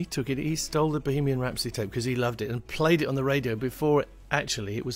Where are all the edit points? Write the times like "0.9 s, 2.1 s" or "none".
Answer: none